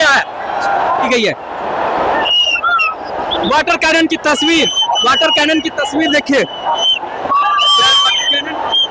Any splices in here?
yes; 1 cut; at 0.9 s

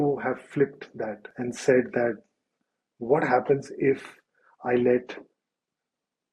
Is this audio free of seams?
no; 1 cut; at 1.3 s

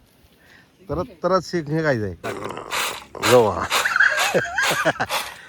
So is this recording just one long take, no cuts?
no; 1 cut; at 2.3 s

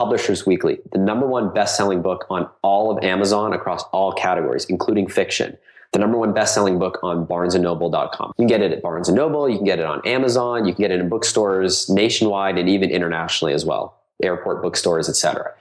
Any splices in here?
yes; 1 cut; at 8.2 s

